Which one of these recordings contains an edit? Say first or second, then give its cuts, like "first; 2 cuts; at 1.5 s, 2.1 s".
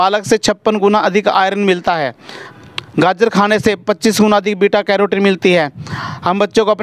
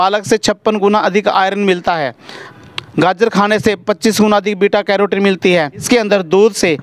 second; 1 cut; at 5.8 s